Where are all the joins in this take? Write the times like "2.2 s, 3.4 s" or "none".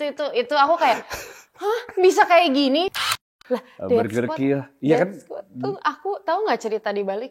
2.9 s